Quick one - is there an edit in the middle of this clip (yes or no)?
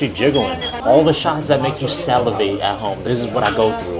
no